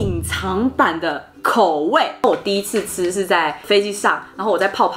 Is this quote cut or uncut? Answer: cut